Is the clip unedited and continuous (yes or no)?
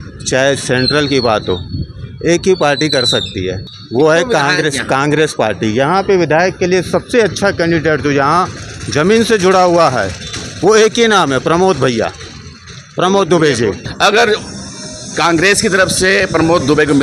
no